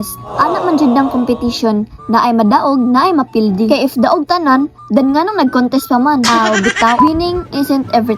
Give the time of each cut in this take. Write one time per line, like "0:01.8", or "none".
0:07.0